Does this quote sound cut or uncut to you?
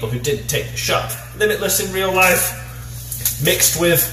cut